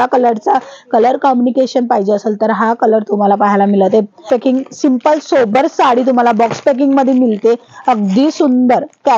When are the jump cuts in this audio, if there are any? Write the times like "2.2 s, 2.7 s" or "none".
4.2 s